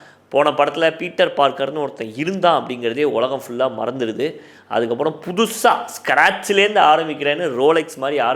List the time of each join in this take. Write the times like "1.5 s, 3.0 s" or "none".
none